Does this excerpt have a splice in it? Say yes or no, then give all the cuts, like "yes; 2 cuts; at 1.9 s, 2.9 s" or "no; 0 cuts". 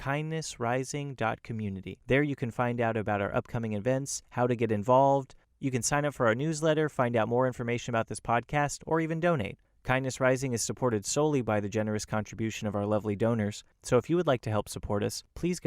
yes; 1 cut; at 1.9 s